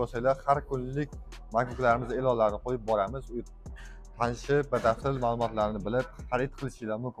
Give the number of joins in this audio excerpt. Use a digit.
0